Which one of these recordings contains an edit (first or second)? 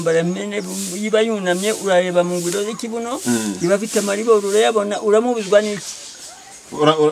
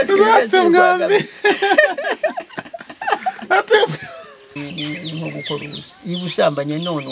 second